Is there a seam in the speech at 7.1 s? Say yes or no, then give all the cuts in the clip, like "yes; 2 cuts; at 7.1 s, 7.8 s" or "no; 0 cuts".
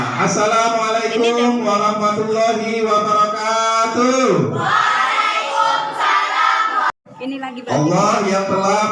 yes; 1 cut; at 7.1 s